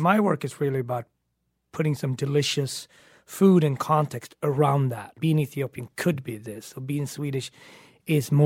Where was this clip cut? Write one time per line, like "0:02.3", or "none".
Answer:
0:05.2